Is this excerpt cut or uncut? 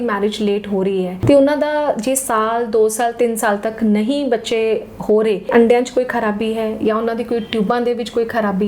cut